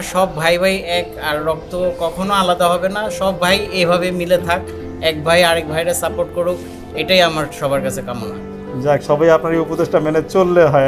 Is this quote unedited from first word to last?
yes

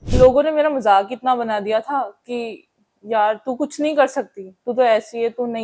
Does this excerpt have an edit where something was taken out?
no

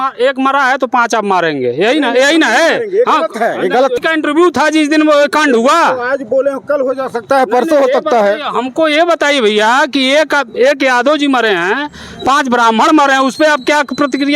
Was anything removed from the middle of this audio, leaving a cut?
yes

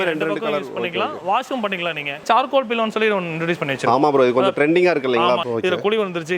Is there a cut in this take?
yes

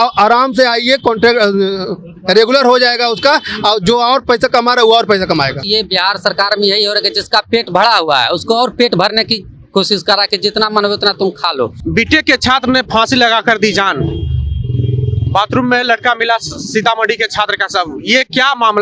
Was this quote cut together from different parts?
yes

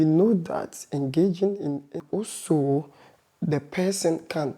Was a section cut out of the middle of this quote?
yes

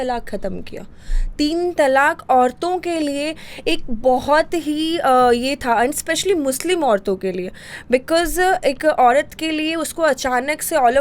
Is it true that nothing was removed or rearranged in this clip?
yes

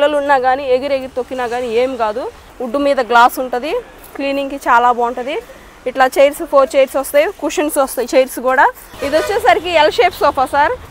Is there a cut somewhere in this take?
yes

